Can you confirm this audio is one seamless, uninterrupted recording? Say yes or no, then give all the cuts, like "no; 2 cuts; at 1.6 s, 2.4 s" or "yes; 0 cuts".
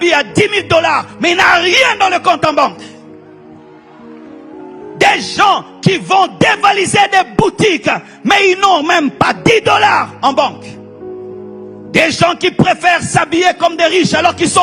yes; 0 cuts